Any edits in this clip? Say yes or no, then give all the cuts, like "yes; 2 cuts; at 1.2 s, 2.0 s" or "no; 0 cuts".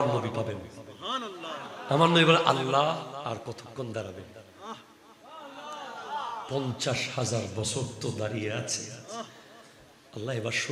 yes; 1 cut; at 3.2 s